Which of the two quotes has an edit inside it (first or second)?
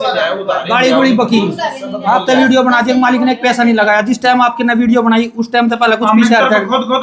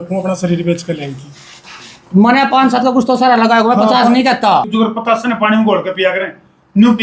second